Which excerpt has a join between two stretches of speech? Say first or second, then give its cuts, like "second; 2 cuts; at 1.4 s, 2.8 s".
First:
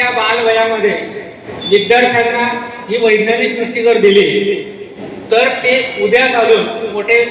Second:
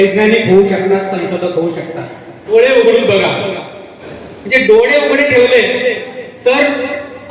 second; 1 cut; at 2.4 s